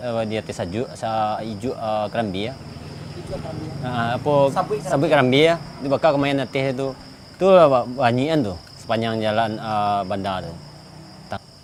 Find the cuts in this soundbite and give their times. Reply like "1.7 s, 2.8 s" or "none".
none